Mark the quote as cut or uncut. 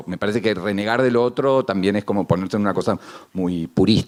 uncut